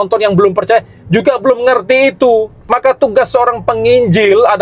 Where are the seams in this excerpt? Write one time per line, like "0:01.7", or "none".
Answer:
0:02.6